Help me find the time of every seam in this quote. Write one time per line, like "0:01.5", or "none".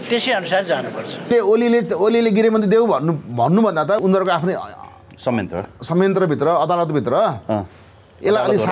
0:01.3
0:04.0